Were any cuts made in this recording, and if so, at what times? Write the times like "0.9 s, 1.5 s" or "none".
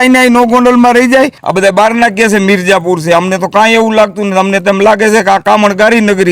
1.4 s

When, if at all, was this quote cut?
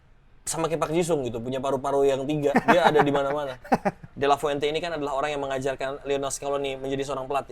4.1 s

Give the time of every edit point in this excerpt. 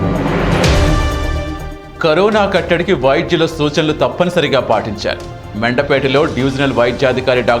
1.2 s

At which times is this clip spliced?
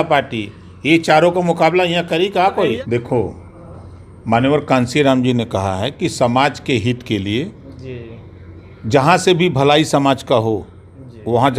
2.8 s

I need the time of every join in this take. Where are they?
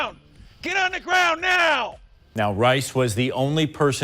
2.3 s

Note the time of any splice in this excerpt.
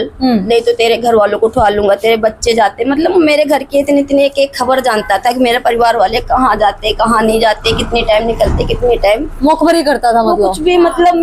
none

